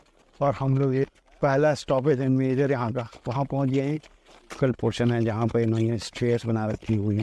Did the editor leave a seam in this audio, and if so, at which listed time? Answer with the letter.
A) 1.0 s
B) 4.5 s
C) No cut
B